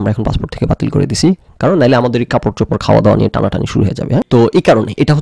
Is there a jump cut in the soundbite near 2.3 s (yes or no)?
no